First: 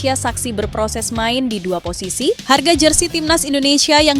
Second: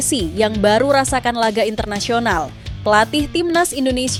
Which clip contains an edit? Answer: first; 1 cut; at 2.4 s

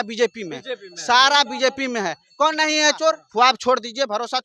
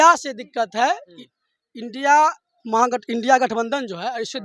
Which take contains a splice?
first; 1 cut; at 3.2 s

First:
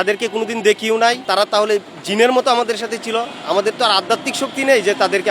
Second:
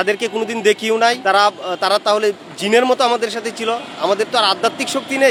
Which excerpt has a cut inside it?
first; 1 cut; at 1.2 s

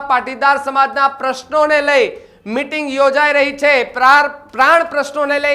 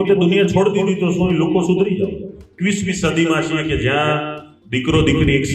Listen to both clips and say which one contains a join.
second; 1 cut; at 2.7 s

